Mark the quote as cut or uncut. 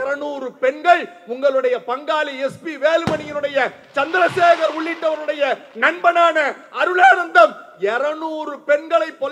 uncut